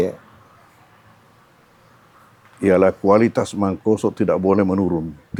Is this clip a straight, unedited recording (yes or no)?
yes